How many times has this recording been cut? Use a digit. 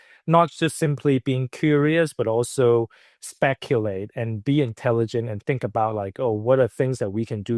0